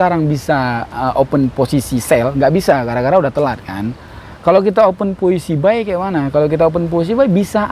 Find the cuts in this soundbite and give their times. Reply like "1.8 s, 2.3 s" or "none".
none